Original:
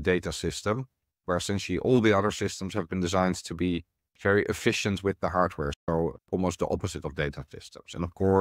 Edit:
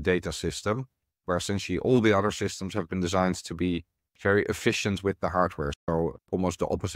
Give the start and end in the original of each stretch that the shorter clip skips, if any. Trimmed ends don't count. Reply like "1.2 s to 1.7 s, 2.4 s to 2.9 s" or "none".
none